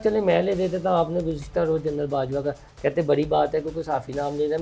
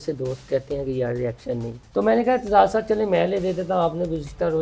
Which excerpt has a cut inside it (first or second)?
second